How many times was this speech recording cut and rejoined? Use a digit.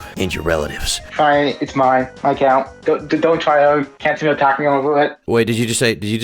2